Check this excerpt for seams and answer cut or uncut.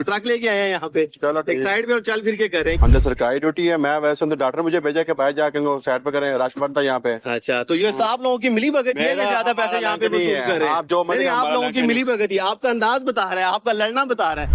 cut